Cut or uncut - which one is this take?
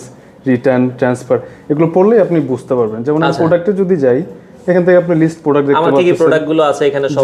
uncut